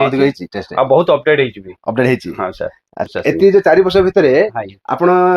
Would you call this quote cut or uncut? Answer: cut